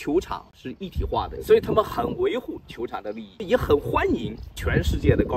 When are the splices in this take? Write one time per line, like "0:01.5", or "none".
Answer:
0:01.3
0:03.4